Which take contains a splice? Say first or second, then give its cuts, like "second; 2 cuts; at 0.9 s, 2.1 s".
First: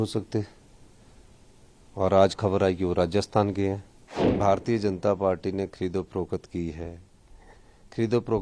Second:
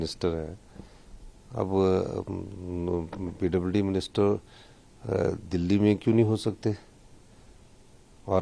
first; 1 cut; at 4.4 s